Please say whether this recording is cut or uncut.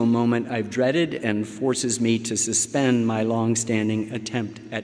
uncut